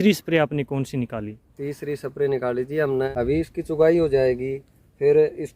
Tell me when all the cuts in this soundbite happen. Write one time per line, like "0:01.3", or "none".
0:03.1